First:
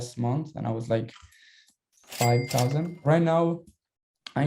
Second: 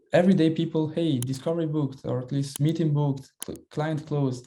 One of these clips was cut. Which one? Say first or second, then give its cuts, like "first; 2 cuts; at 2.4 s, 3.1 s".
first; 1 cut; at 3.0 s